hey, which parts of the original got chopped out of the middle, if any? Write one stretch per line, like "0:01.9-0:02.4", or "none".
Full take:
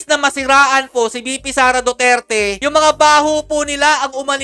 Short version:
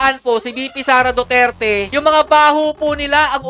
none